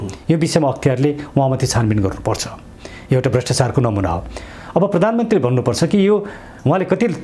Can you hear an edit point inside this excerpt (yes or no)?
no